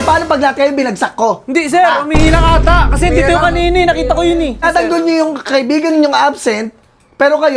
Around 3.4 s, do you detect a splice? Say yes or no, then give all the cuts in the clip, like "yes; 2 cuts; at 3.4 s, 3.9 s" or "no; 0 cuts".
no; 1 cut; at 4.6 s